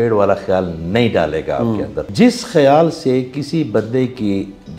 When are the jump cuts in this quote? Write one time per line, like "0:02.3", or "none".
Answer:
0:02.1